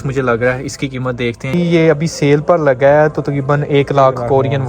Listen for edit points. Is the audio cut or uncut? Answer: cut